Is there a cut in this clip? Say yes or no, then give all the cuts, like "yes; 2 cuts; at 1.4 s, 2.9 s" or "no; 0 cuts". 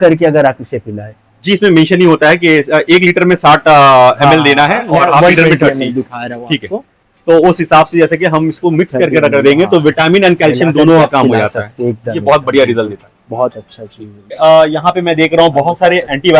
no; 0 cuts